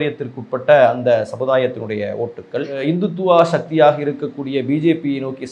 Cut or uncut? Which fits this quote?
uncut